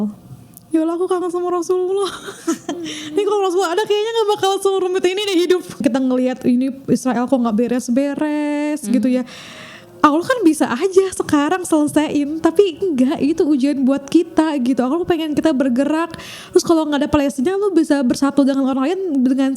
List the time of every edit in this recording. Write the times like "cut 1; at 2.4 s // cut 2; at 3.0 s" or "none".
cut 1; at 5.8 s